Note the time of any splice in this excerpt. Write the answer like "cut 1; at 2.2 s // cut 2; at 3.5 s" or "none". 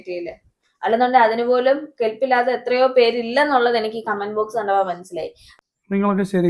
cut 1; at 5.4 s